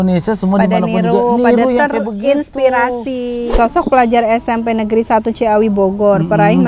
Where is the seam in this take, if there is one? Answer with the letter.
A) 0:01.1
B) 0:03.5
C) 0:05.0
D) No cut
B